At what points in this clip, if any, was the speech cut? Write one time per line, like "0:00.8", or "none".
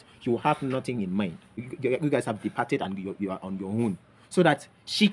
0:01.7